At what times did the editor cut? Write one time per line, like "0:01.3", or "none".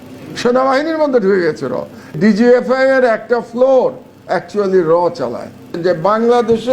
0:02.2
0:05.7